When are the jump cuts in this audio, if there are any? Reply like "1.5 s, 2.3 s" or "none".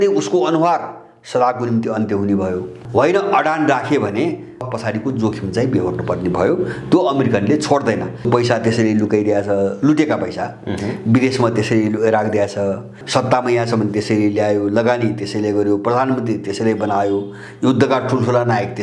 2.8 s, 4.7 s, 8.3 s, 13.0 s